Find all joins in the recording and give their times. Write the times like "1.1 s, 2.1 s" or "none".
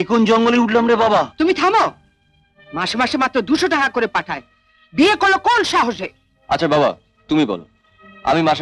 none